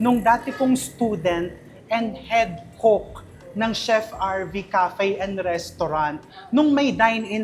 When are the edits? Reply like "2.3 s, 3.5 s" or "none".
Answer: none